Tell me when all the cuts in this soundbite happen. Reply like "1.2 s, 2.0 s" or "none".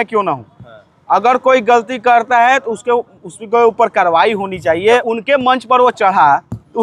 5.1 s

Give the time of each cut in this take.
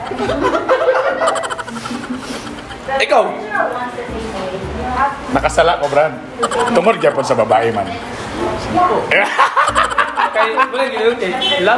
none

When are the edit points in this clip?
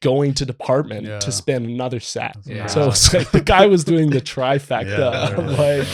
none

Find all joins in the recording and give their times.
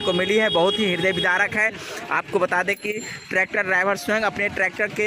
none

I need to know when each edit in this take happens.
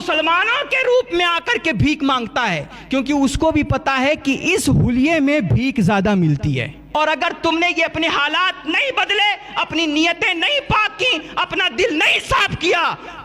6.9 s

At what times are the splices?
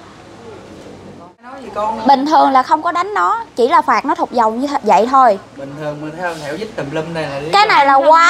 1.5 s

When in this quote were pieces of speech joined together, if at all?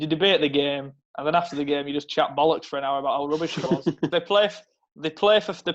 4.1 s

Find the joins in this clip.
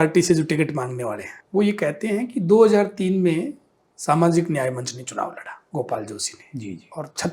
1.3 s, 5.6 s

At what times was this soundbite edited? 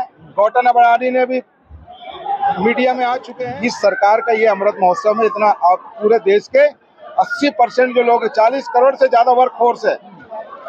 3.3 s

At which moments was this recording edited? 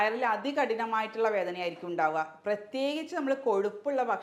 none

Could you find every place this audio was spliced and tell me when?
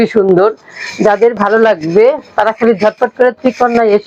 none

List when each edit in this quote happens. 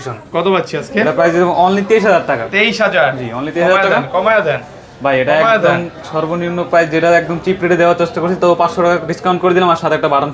none

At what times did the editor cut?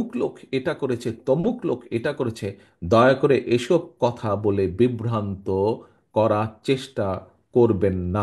none

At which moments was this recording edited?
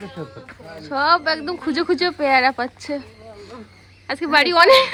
none

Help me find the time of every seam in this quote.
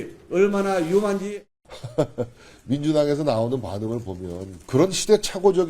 1.4 s, 4.5 s

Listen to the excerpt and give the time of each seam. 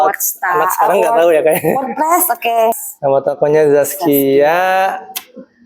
2.7 s

